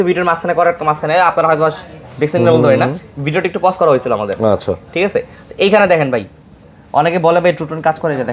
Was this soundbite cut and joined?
no; 0 cuts

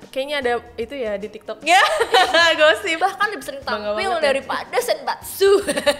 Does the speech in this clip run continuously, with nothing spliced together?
no; 1 cut; at 3.0 s

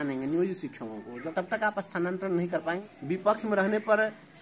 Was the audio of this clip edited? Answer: yes; 2 cuts; at 1.2 s, 2.8 s

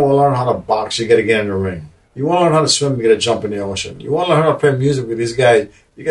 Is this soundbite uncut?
no; 1 cut; at 2.0 s

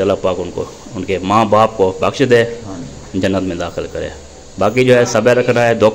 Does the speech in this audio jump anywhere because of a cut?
no; 0 cuts

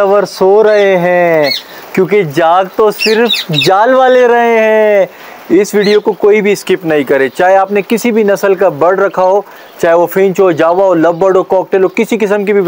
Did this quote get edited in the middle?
no; 0 cuts

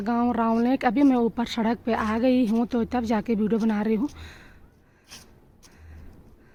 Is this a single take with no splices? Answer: yes; 0 cuts

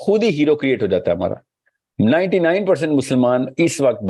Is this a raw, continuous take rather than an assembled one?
yes; 0 cuts

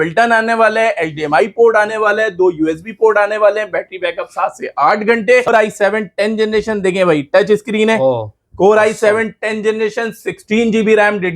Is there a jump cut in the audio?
yes; 1 cut; at 5.5 s

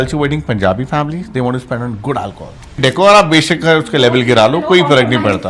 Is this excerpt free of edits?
no; 1 cut; at 2.8 s

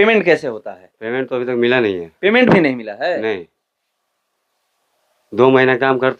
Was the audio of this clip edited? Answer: no; 0 cuts

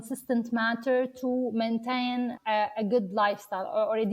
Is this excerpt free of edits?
no; 1 cut; at 2.4 s

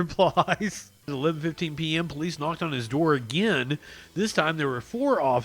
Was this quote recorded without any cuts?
no; 1 cut; at 1.1 s

